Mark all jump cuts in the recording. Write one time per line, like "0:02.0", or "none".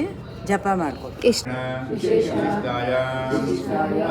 0:01.4